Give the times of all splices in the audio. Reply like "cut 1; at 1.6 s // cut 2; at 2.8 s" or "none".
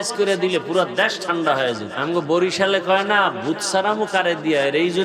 cut 1; at 1.9 s